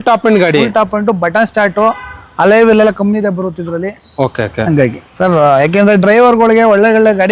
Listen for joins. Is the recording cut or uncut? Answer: cut